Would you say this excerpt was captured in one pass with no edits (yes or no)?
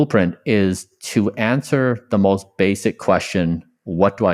yes